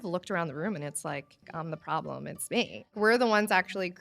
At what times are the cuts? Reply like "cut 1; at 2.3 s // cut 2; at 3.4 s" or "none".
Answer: cut 1; at 1.4 s // cut 2; at 2.9 s

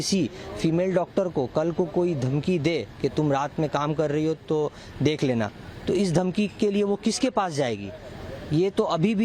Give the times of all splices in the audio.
none

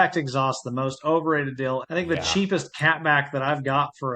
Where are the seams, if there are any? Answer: cut 1; at 1.8 s

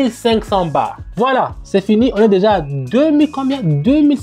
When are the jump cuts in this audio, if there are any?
cut 1; at 1.0 s

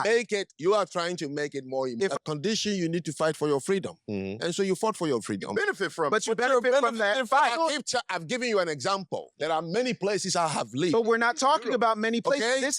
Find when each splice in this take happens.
cut 1; at 2.1 s

